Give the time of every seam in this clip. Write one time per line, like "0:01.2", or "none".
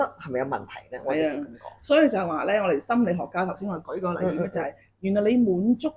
none